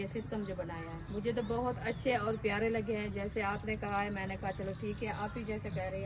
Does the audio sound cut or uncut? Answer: uncut